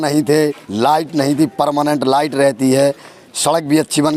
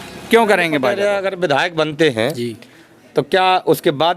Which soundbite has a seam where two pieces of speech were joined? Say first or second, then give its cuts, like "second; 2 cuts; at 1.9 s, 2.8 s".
second; 1 cut; at 0.9 s